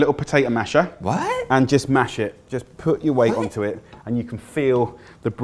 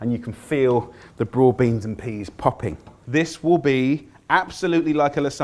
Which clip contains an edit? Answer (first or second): second